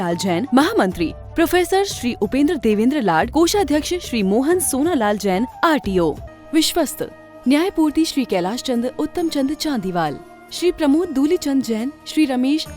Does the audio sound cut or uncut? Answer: cut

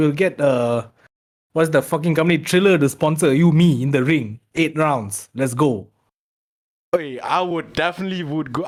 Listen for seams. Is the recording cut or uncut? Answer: uncut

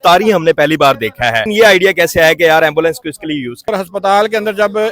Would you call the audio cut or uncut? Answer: cut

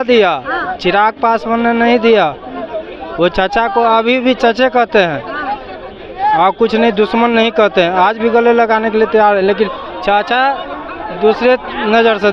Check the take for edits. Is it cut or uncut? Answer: uncut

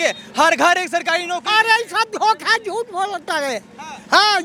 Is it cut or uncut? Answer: uncut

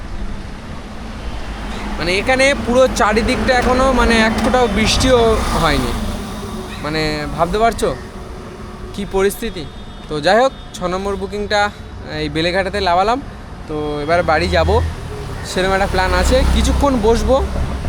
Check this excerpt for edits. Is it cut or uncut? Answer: uncut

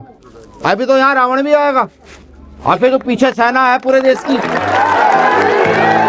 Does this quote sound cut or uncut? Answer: uncut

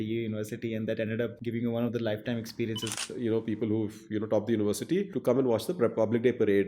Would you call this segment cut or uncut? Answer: cut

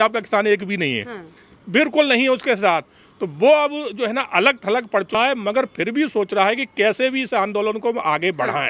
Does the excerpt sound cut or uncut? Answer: uncut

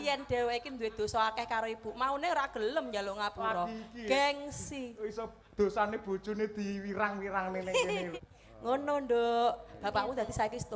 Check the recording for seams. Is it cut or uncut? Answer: cut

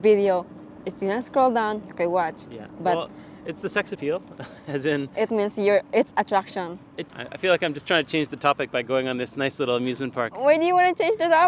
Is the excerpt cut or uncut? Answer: cut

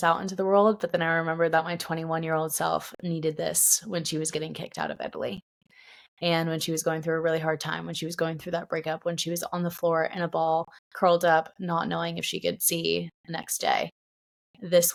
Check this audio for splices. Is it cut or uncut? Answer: uncut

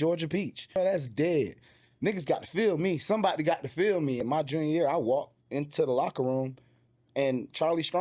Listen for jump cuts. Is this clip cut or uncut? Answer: cut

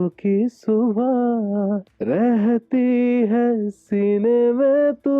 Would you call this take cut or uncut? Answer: cut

